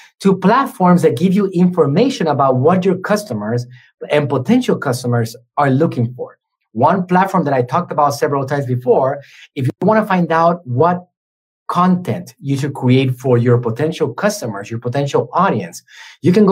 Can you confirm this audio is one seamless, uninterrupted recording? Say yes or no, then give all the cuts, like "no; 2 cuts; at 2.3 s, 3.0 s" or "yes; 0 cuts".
yes; 0 cuts